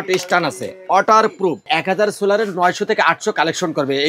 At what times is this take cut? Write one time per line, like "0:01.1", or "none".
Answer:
0:01.6